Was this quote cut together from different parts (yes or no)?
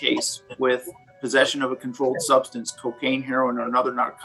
no